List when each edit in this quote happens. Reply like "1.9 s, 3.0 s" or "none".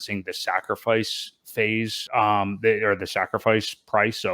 2.0 s

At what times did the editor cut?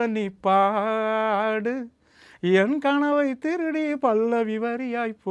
none

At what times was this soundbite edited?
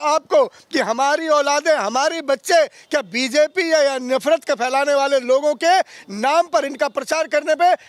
none

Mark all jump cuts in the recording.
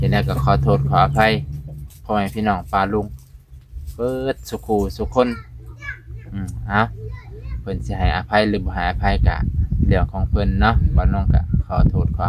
none

